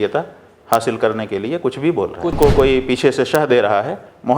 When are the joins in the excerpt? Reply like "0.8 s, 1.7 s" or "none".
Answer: 2.4 s